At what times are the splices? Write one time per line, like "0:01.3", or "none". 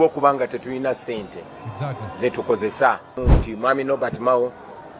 0:03.1